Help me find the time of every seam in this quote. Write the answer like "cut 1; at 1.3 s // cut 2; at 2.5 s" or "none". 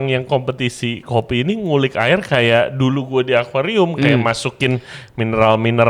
none